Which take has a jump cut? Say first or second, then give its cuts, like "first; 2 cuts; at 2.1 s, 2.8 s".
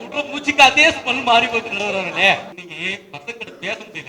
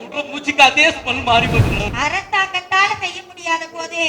second; 1 cut; at 1.9 s